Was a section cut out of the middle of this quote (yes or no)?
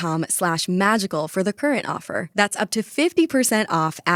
no